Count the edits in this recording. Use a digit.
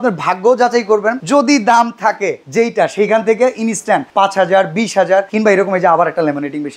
4